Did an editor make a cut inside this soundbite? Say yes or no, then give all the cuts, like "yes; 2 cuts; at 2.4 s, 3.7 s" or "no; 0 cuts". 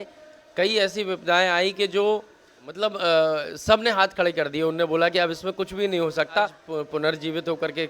yes; 2 cuts; at 2.7 s, 6.6 s